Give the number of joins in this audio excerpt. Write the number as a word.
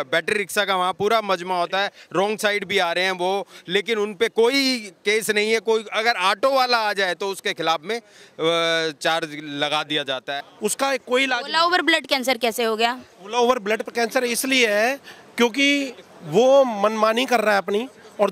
one